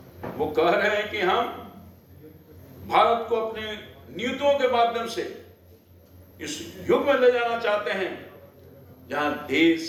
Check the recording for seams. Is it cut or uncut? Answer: uncut